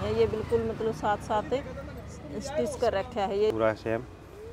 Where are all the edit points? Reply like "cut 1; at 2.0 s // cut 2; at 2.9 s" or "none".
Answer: cut 1; at 3.5 s

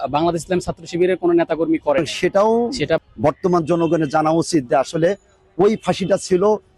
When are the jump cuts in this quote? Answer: cut 1; at 2.0 s

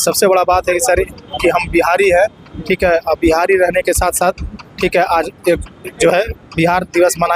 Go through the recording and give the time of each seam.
none

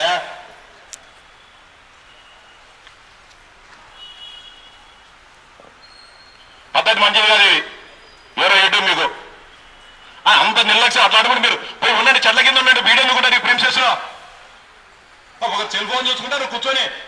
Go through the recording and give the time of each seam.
none

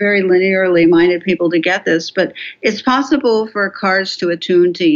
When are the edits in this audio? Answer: none

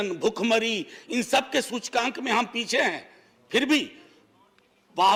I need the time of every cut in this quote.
none

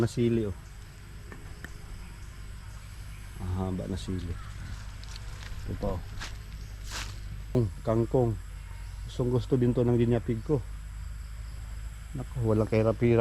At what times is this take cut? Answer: cut 1; at 7.6 s

